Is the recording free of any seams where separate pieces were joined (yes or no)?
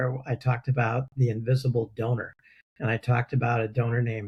yes